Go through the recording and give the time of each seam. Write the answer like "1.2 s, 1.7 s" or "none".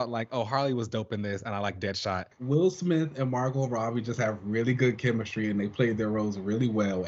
2.3 s